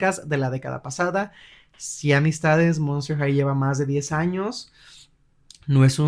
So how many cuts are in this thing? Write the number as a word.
zero